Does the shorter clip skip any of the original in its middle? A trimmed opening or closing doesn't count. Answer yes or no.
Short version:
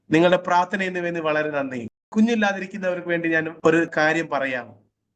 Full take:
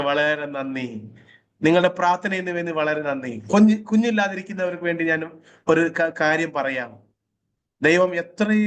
yes